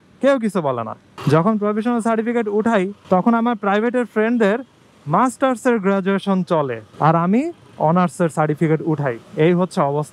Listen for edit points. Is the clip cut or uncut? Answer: cut